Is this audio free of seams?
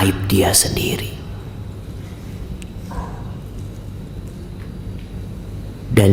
yes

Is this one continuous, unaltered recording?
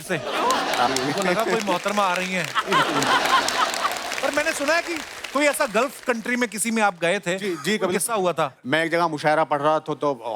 yes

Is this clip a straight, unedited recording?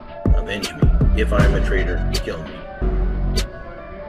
yes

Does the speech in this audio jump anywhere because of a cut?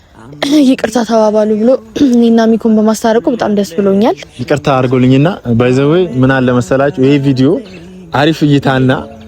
yes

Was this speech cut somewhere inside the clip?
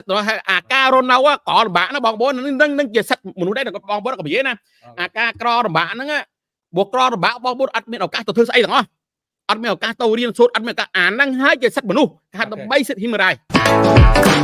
yes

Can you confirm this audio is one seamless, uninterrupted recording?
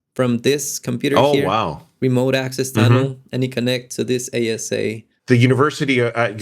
no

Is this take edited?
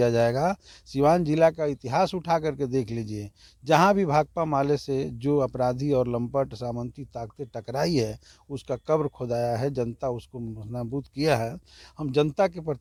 no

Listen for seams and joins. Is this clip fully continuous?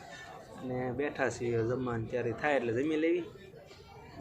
yes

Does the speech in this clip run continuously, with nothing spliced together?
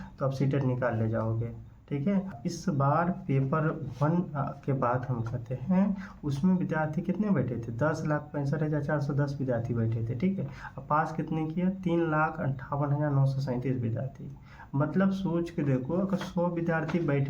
no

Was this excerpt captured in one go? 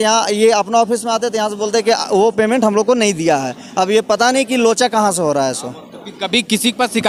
yes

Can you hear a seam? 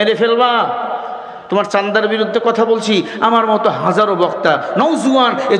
yes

